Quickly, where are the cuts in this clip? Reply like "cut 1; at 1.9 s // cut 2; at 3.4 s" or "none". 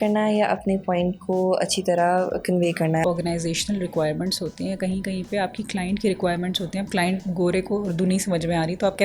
cut 1; at 3.0 s